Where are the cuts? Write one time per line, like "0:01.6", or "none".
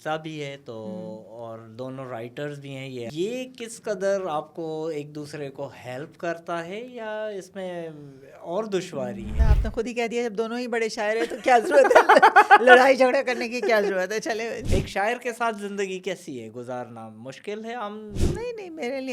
0:03.1
0:09.3
0:14.6